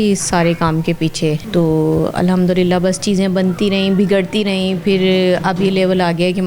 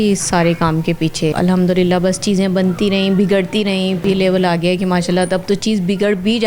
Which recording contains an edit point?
second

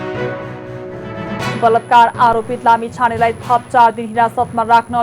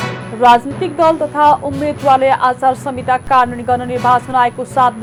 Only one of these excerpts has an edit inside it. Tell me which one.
first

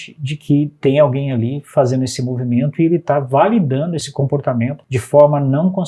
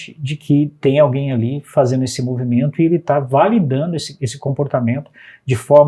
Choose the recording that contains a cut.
first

